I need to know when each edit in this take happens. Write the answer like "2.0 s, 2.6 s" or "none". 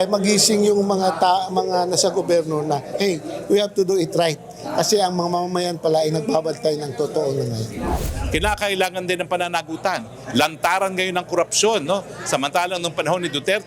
8.1 s